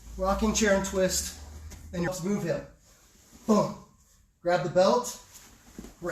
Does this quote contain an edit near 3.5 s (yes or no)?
no